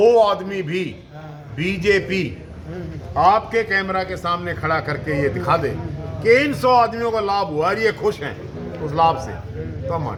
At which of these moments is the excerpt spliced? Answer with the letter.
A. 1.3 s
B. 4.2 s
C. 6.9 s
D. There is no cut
D